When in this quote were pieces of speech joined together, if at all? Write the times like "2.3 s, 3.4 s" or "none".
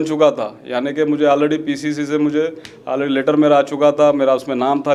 none

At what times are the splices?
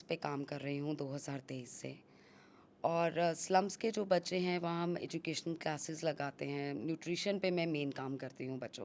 none

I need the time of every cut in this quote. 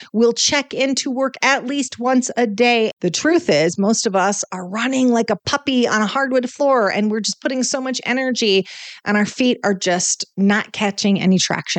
2.9 s

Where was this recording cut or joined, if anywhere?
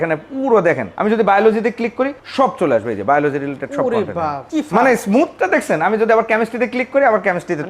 0.9 s, 2.2 s, 4.4 s

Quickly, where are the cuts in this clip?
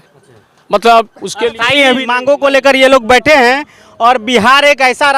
2.1 s

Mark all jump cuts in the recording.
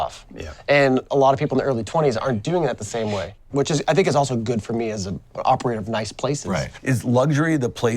3.4 s, 5.4 s, 6.8 s

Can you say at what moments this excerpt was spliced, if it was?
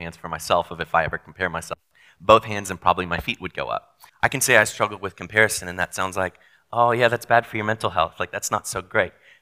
4.0 s

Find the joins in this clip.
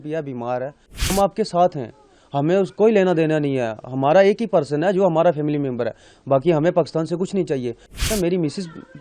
1.1 s, 8.1 s

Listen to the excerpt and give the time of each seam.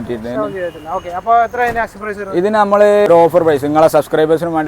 3.1 s

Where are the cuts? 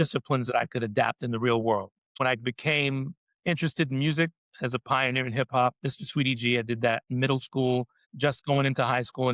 2.2 s, 8.0 s

